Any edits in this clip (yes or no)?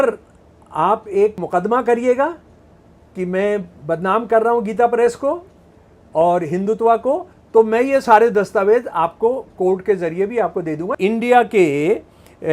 yes